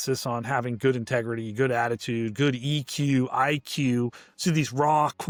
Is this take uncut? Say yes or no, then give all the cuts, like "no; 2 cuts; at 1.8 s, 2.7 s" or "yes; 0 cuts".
yes; 0 cuts